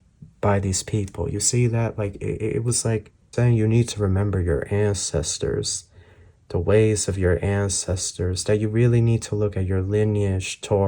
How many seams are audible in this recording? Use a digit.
1